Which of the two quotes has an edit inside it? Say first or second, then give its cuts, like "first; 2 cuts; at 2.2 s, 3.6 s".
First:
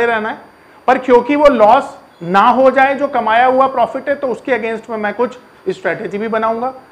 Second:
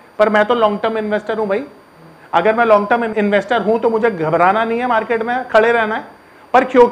second; 1 cut; at 3.1 s